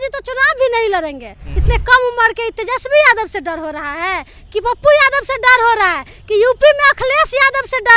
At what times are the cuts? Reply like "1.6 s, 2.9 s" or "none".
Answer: 1.5 s